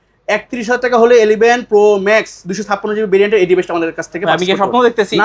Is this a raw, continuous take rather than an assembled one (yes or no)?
yes